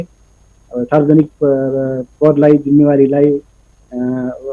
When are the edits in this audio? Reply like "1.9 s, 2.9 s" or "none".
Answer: none